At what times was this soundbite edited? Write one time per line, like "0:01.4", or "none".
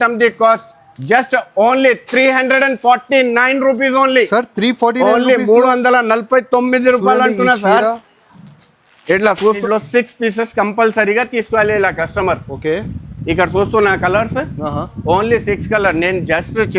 0:09.6